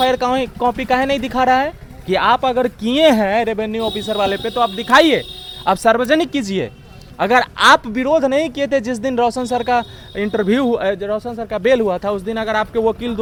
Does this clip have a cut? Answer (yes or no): no